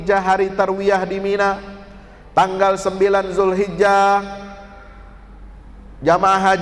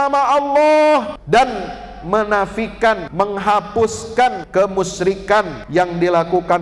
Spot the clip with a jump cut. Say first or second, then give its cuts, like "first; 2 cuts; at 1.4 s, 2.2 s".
second; 4 cuts; at 1.2 s, 3.1 s, 4.4 s, 5.6 s